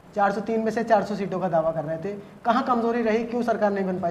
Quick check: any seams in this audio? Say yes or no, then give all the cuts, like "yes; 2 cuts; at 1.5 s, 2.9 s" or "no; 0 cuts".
no; 0 cuts